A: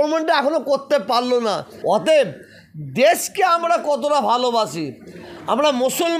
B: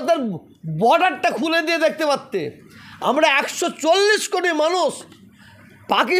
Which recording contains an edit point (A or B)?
A